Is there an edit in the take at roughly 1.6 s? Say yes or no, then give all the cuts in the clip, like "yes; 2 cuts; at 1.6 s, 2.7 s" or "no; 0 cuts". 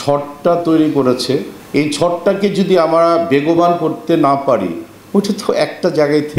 yes; 1 cut; at 1.6 s